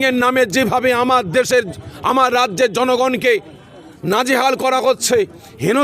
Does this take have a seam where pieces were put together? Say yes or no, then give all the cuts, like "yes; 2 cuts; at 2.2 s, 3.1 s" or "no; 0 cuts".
no; 0 cuts